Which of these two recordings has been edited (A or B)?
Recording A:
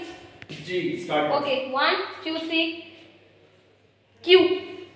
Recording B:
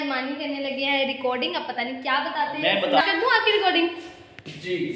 B